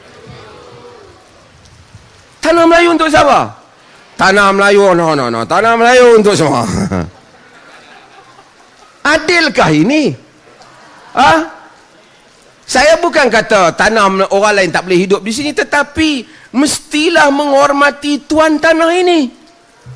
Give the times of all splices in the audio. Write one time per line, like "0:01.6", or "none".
none